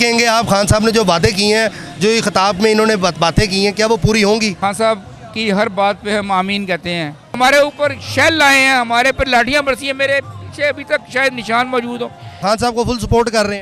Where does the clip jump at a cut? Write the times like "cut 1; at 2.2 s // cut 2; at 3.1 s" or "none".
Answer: cut 1; at 4.6 s // cut 2; at 7.4 s // cut 3; at 12.4 s

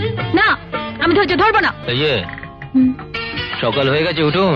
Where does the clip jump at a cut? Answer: cut 1; at 1.9 s

